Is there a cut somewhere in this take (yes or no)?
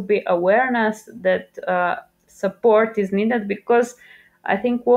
no